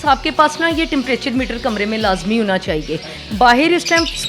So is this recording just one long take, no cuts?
yes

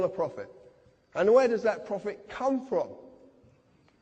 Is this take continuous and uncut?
no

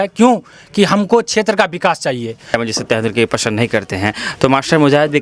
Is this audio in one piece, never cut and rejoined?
yes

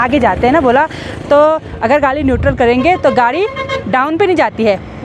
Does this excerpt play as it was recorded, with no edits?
yes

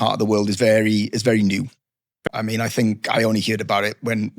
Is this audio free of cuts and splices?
no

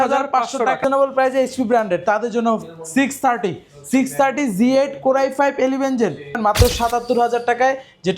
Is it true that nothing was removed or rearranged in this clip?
no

